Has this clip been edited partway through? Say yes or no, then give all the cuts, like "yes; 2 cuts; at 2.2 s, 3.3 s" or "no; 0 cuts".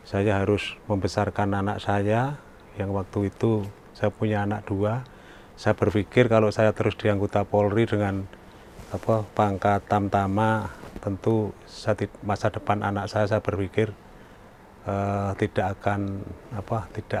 no; 0 cuts